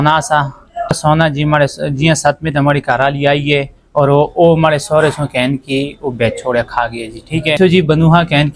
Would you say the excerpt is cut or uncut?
cut